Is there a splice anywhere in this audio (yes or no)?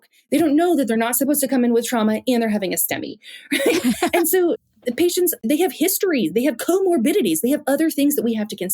yes